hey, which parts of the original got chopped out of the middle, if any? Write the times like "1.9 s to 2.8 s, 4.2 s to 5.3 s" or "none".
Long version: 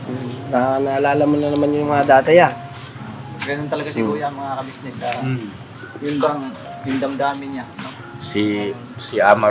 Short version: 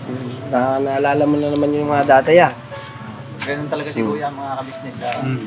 none